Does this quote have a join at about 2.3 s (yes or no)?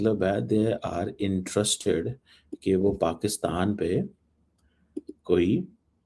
no